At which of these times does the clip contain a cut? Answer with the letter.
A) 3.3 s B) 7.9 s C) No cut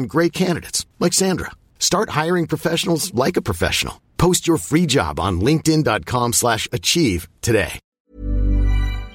B